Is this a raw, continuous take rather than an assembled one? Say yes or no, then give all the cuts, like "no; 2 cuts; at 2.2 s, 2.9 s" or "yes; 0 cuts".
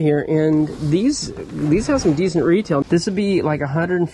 no; 1 cut; at 2.8 s